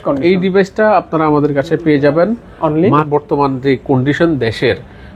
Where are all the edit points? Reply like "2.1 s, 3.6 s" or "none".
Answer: 3.1 s